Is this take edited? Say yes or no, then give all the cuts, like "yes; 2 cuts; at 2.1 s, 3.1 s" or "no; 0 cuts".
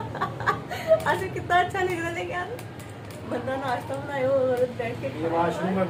no; 0 cuts